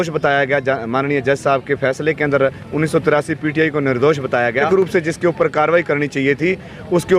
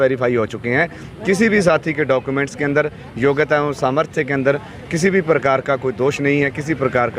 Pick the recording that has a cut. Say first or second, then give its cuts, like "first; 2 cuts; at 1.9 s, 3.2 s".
first; 1 cut; at 4.6 s